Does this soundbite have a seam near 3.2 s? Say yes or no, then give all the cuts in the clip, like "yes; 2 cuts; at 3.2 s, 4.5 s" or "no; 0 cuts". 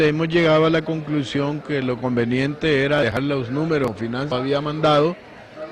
yes; 1 cut; at 3.2 s